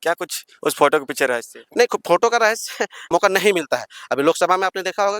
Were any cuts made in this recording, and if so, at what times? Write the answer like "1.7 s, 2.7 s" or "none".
3.0 s